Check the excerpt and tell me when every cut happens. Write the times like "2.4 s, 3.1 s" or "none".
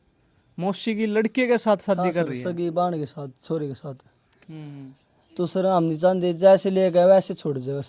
4.5 s